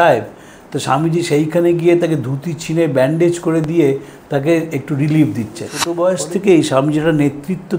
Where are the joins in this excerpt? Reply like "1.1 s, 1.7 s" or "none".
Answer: 5.8 s